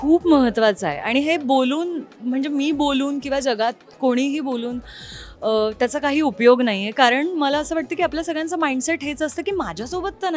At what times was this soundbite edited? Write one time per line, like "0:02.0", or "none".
none